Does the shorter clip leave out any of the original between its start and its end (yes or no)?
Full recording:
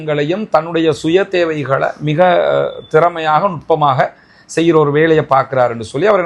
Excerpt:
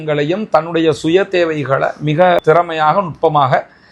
yes